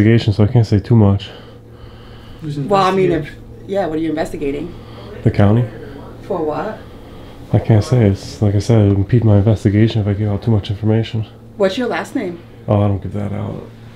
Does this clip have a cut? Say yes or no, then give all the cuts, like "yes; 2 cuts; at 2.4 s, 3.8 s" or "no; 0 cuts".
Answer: no; 0 cuts